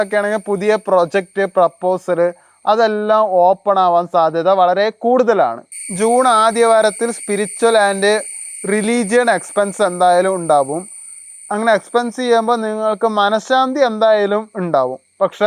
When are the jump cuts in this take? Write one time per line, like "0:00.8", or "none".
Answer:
none